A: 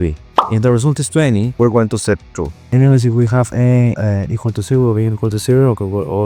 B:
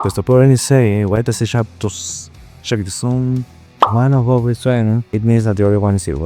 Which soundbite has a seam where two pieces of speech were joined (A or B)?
A